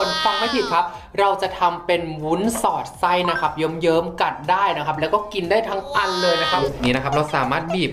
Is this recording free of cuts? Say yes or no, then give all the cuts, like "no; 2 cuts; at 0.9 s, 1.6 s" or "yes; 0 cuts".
no; 1 cut; at 6.7 s